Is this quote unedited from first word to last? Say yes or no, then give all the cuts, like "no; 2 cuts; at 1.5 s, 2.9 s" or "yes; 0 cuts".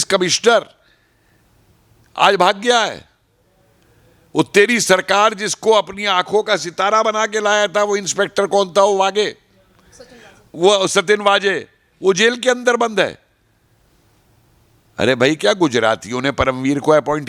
yes; 0 cuts